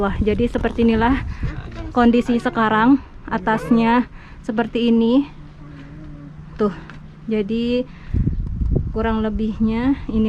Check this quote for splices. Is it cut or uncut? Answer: uncut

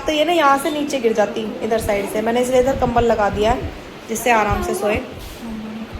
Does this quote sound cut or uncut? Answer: uncut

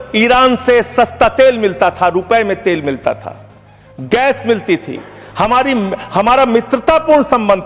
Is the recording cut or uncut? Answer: uncut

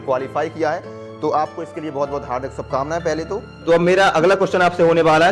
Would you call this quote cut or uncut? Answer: uncut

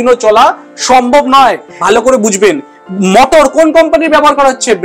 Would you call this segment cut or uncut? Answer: cut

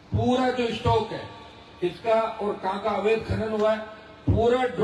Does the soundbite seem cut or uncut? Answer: uncut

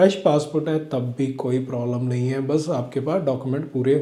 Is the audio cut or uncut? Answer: uncut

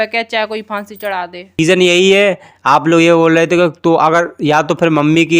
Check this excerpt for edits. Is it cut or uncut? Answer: cut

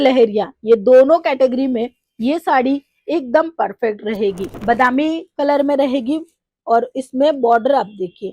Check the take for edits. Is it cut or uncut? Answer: cut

